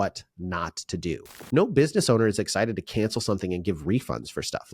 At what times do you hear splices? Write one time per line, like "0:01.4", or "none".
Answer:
0:01.3